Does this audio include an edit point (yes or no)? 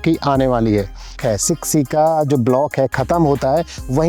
yes